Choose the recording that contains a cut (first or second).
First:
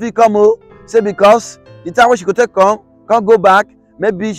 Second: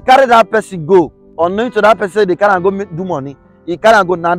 second